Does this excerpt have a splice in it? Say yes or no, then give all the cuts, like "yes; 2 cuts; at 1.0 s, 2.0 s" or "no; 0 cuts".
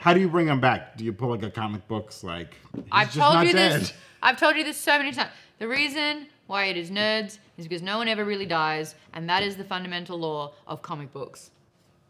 no; 0 cuts